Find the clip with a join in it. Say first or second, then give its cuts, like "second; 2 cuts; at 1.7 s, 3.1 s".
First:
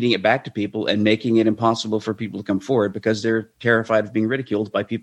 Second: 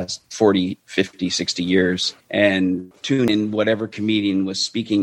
second; 2 cuts; at 2.1 s, 3.2 s